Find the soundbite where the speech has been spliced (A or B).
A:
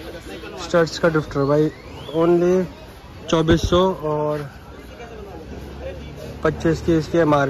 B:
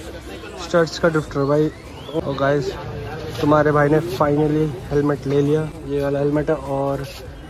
B